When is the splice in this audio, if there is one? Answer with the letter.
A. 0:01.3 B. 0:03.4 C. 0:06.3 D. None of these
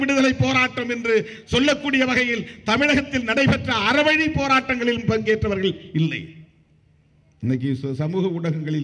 D